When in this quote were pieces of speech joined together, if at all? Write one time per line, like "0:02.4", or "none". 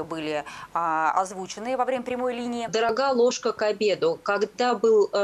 0:02.9